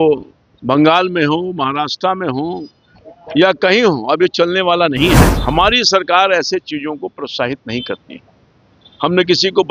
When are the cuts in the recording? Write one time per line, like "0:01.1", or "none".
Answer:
0:05.3